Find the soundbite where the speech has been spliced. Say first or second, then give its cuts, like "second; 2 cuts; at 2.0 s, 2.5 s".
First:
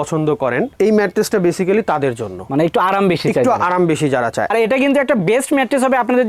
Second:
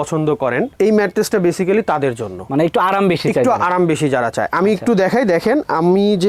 first; 1 cut; at 4.5 s